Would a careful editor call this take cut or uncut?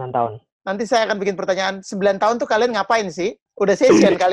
cut